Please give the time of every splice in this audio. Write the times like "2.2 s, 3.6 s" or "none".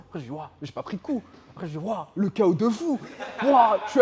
none